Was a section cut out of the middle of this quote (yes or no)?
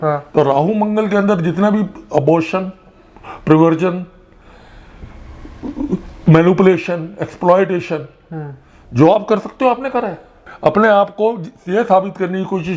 no